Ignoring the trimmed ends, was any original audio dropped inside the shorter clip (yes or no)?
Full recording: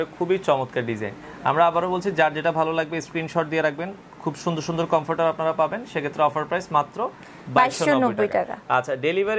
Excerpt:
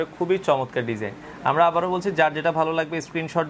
no